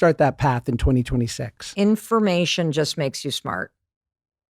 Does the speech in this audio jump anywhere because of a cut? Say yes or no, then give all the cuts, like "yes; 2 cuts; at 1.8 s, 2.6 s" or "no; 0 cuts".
yes; 1 cut; at 1.7 s